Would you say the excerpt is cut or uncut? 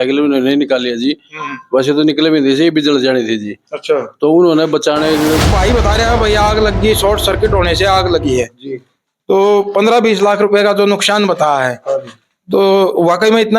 cut